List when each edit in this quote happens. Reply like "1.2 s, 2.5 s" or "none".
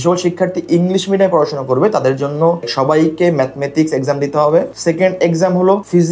none